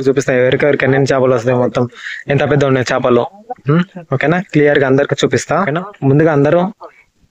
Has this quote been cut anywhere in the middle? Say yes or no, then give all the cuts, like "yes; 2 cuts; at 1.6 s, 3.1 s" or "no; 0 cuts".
yes; 1 cut; at 5.8 s